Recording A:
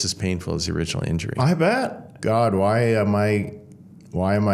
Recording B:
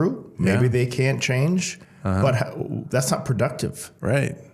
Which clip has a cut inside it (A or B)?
A